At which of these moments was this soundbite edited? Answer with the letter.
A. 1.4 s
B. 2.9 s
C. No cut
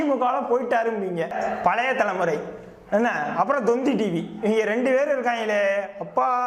A